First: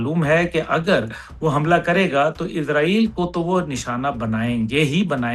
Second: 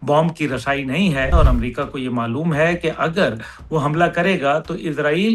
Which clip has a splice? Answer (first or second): second